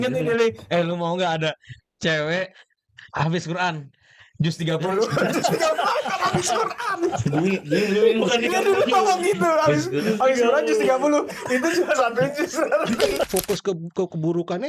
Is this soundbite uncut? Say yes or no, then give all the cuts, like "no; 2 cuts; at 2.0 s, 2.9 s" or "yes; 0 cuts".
no; 1 cut; at 13.3 s